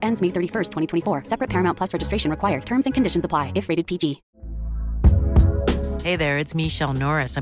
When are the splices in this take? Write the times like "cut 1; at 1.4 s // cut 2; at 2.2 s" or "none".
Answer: cut 1; at 4.3 s